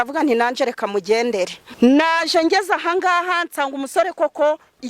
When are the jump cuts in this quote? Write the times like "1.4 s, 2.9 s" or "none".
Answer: 1.6 s